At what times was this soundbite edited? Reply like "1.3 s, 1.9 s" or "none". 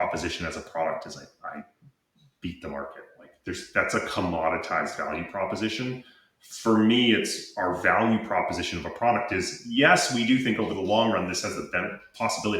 none